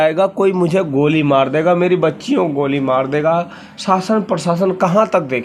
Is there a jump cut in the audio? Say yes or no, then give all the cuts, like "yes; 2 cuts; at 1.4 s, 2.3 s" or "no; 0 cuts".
no; 0 cuts